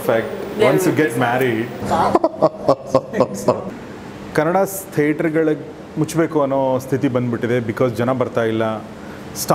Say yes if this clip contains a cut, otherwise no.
yes